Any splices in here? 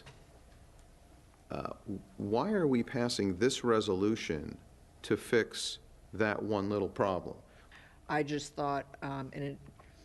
yes; 1 cut; at 7.6 s

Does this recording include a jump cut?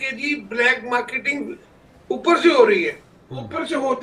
no; 0 cuts

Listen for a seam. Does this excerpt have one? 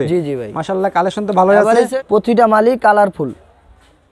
yes; 1 cut; at 2.0 s

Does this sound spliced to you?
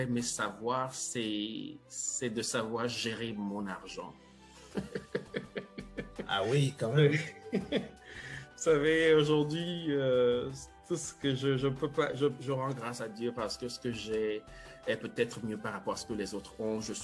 no; 0 cuts

